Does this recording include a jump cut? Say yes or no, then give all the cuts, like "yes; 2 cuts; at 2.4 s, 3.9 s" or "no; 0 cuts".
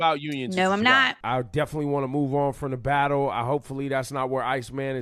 yes; 1 cut; at 1.1 s